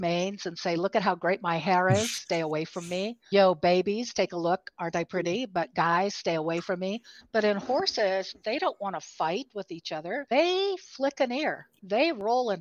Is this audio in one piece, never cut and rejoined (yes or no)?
no